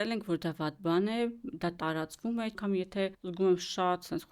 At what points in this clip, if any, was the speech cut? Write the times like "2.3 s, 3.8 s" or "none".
2.9 s